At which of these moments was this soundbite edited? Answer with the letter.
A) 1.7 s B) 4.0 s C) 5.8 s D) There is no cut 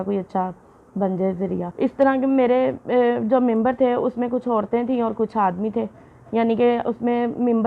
A